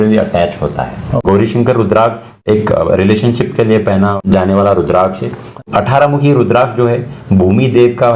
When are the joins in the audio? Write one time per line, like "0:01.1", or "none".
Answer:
0:01.1
0:02.4
0:04.2
0:05.6